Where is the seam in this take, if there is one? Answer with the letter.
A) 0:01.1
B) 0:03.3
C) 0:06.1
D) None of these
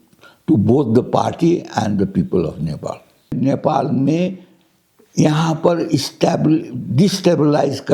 B